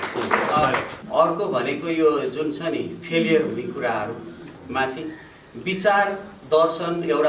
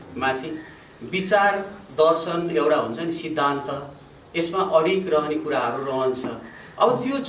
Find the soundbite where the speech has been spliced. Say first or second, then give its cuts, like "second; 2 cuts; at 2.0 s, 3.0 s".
first; 1 cut; at 0.9 s